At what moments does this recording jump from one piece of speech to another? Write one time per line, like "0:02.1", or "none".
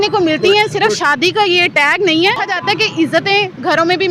0:02.5